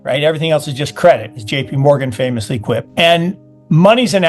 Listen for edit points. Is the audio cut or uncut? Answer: cut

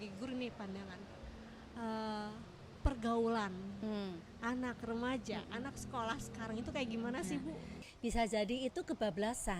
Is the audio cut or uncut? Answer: cut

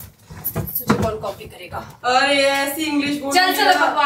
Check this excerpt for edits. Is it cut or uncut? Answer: cut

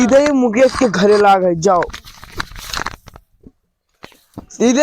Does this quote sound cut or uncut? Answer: uncut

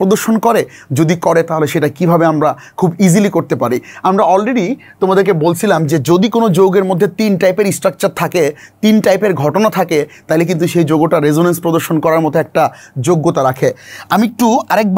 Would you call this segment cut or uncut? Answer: uncut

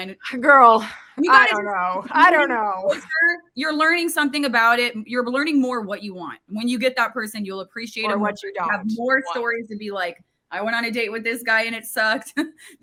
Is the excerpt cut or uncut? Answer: uncut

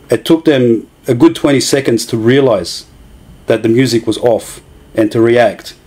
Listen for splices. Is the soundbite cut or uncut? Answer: uncut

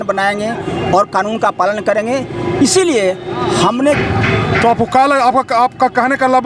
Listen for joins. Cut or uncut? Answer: cut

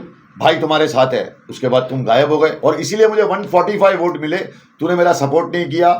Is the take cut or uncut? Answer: cut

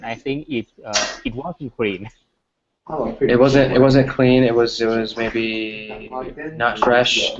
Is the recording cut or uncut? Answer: cut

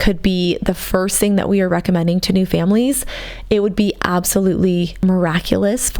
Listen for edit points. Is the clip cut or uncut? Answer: cut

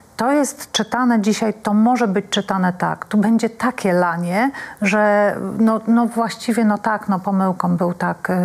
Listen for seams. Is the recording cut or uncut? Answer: uncut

